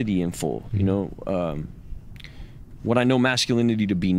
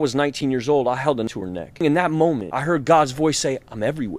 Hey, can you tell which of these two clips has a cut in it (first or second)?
second